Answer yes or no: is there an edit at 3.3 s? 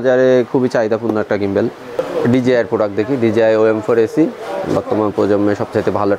no